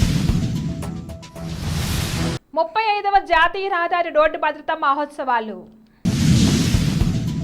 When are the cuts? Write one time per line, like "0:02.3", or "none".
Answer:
none